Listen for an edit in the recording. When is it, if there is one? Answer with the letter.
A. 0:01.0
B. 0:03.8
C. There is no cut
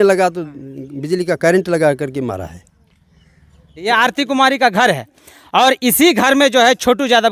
B